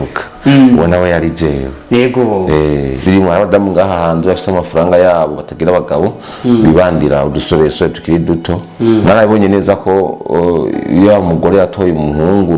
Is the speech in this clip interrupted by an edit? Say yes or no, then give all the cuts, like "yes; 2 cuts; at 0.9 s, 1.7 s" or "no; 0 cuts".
yes; 1 cut; at 3.0 s